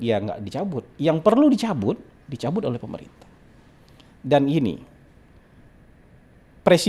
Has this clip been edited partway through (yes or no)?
no